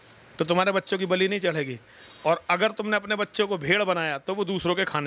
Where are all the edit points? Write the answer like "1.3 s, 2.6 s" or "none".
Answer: none